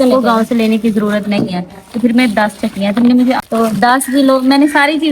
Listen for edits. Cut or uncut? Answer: cut